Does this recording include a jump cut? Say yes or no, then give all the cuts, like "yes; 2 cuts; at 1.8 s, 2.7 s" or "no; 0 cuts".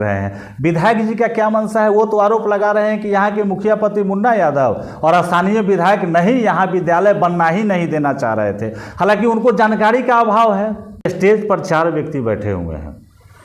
yes; 1 cut; at 11.1 s